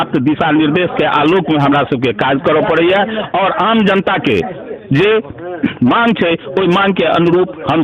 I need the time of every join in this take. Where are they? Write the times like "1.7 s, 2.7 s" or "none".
none